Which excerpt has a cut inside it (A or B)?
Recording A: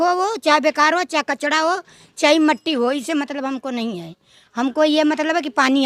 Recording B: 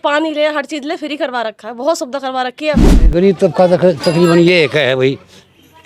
B